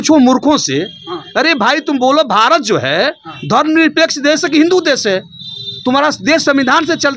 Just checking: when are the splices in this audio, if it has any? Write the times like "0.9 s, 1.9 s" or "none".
none